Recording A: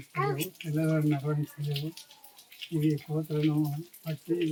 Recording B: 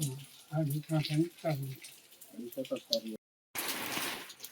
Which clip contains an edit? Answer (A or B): B